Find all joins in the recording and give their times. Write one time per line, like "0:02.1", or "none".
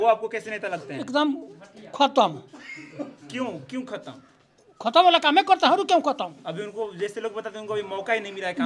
none